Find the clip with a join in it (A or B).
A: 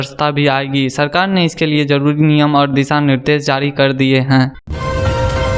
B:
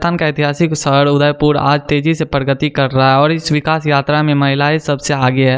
A